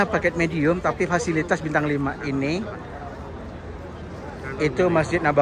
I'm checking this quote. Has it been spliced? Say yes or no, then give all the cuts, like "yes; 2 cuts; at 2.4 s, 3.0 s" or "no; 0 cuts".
no; 0 cuts